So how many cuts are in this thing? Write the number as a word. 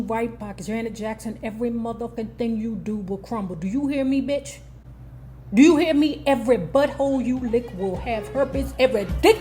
one